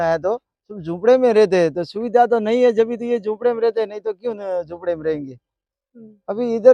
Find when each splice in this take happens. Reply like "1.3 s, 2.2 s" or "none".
none